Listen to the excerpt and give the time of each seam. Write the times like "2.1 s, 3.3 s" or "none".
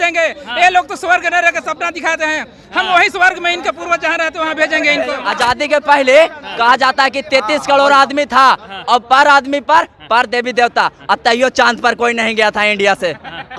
5.2 s